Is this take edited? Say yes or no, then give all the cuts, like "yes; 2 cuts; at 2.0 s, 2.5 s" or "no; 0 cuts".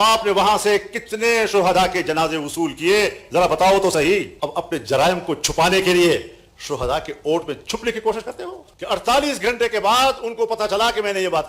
yes; 2 cuts; at 4.3 s, 8.6 s